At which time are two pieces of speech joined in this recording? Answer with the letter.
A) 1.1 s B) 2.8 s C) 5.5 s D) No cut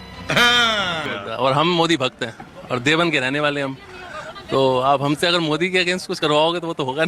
A